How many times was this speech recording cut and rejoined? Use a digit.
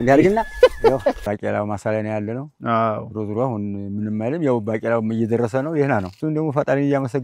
1